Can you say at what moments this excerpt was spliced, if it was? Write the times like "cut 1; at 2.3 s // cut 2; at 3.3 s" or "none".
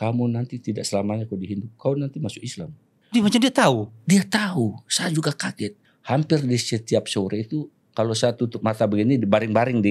cut 1; at 5.9 s